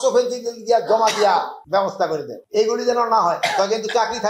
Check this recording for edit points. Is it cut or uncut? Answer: uncut